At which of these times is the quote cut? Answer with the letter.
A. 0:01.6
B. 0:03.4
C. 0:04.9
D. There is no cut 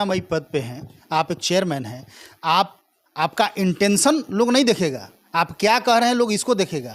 D